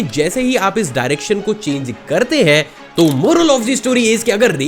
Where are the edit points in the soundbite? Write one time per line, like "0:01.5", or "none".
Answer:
0:02.8